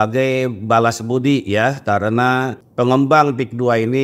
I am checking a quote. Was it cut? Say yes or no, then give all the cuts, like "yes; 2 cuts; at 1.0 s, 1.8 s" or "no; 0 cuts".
yes; 1 cut; at 2.6 s